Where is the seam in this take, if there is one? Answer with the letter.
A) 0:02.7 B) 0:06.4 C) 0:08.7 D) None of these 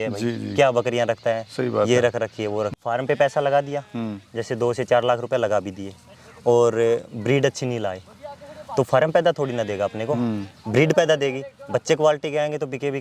A